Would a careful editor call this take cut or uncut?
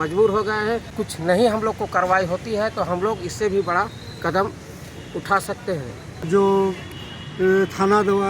cut